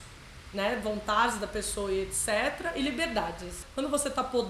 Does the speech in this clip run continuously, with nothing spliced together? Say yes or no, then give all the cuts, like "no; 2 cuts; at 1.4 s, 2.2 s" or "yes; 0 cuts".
no; 1 cut; at 3.6 s